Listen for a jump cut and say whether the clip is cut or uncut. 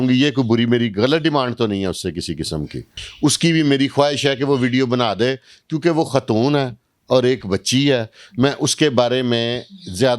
cut